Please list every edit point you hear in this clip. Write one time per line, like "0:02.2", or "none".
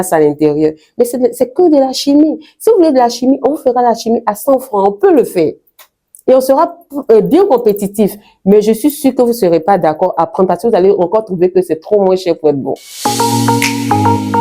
0:12.8